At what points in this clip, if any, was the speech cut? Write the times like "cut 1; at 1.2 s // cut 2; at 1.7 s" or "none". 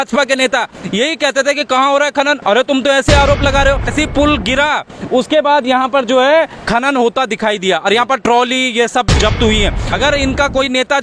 cut 1; at 3.9 s // cut 2; at 9.9 s